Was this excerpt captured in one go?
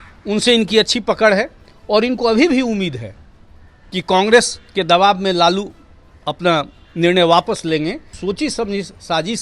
no; 1 cut; at 8.1 s

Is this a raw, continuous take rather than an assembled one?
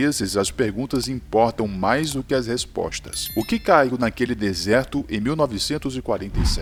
yes; 0 cuts

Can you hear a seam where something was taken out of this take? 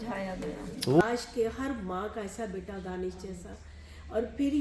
yes; 1 cut; at 1.0 s

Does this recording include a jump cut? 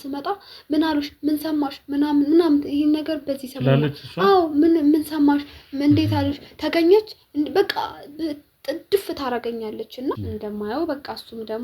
yes; 1 cut; at 10.2 s

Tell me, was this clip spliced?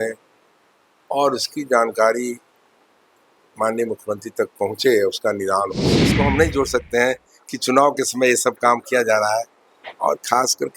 yes; 1 cut; at 6.1 s

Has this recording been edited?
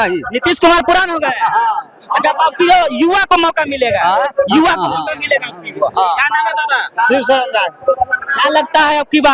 no; 0 cuts

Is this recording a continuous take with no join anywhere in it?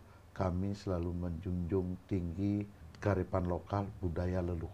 no; 1 cut; at 2.8 s

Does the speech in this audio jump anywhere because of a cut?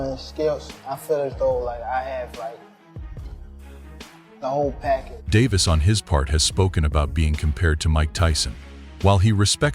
yes; 1 cut; at 5.1 s

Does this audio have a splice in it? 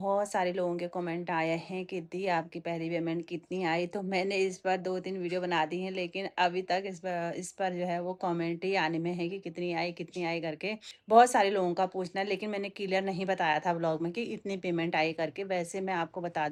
no; 0 cuts

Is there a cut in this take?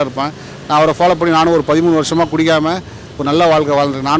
no; 0 cuts

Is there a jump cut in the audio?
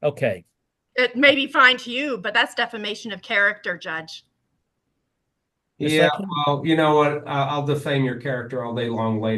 no; 0 cuts

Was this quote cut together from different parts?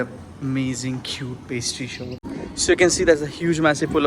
yes; 1 cut; at 2.2 s

